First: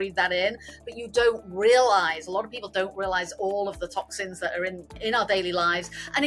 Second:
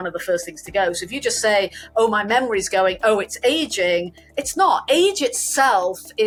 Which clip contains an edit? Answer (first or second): first